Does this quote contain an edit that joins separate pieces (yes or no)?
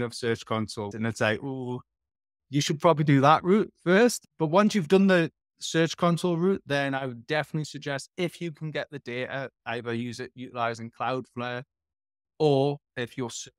yes